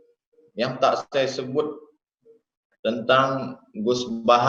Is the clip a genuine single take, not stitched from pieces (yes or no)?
yes